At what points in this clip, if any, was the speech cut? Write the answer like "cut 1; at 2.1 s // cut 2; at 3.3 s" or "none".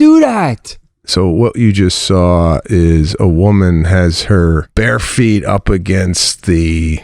cut 1; at 4.7 s

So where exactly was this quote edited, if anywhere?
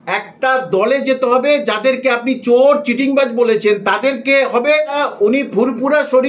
cut 1; at 5.0 s

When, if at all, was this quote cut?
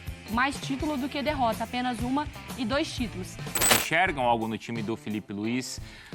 cut 1; at 3.7 s

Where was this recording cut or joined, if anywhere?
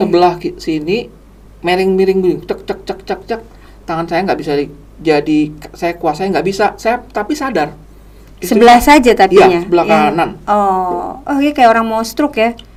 none

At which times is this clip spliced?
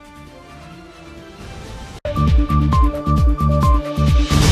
none

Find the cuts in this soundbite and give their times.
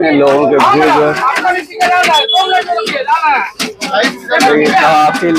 none

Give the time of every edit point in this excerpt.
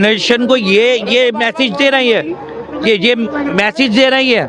none

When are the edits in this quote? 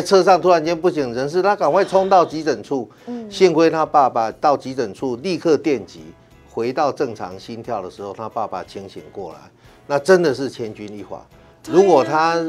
none

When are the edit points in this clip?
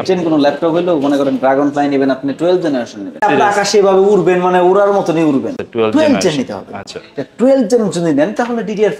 cut 1; at 3.2 s // cut 2; at 5.6 s

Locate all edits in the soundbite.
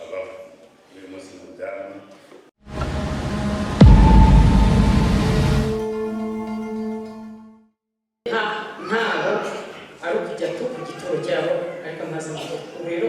cut 1; at 2.5 s // cut 2; at 8.3 s

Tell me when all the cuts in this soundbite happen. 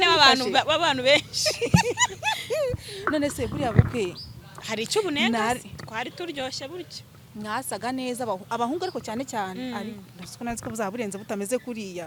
none

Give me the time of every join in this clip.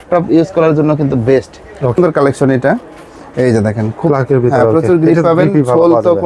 cut 1; at 2.0 s

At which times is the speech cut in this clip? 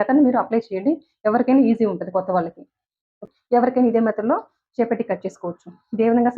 cut 1; at 3.2 s

